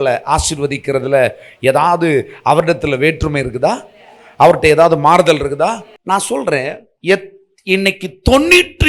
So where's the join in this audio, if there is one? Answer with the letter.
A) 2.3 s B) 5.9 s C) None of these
B